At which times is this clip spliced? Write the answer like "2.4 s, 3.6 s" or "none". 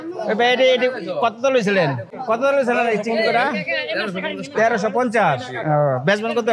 2.1 s